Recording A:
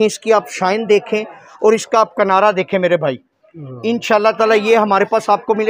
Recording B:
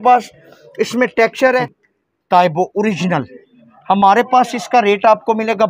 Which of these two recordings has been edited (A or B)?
B